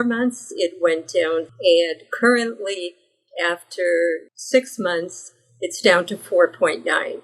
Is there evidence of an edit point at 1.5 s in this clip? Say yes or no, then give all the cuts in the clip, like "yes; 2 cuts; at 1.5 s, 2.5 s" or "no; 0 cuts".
yes; 1 cut; at 1.5 s